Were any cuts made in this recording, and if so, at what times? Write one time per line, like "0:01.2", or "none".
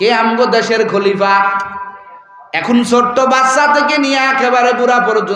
none